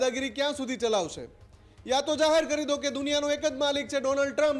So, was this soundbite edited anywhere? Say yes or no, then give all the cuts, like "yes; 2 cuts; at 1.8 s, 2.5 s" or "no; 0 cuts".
no; 0 cuts